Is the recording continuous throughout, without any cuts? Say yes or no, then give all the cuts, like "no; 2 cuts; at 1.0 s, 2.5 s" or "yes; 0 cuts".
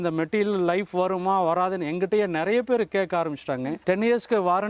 no; 1 cut; at 3.8 s